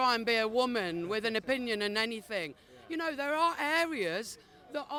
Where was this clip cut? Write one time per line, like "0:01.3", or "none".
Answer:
none

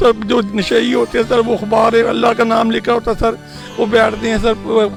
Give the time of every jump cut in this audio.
none

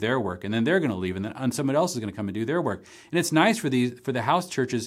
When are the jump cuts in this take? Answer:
none

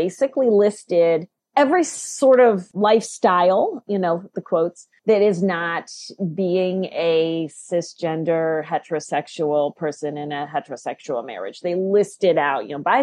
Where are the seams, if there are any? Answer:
0:01.4
0:02.7
0:04.9

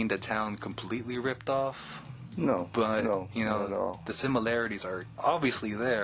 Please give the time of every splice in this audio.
none

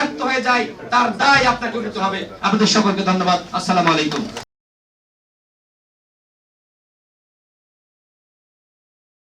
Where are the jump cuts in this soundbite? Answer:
none

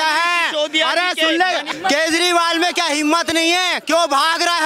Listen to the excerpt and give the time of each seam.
0:01.7

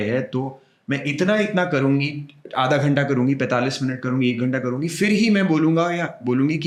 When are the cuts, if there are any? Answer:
none

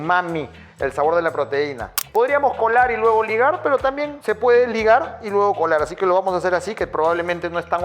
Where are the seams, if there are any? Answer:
0:02.0

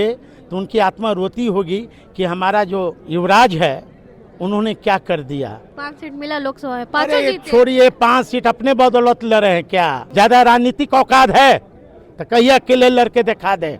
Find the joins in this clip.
0:03.0
0:05.8
0:10.0

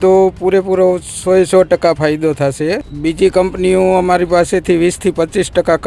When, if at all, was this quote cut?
0:02.9

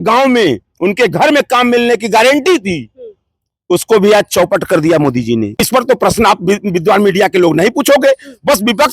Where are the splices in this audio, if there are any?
0:05.6

